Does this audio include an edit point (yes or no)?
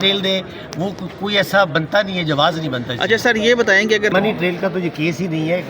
yes